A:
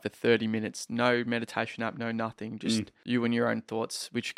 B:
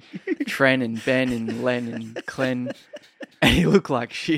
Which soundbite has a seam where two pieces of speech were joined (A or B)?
A